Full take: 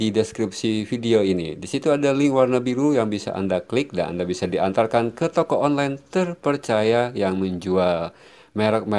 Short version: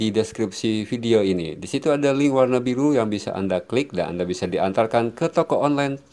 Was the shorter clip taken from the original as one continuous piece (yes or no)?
yes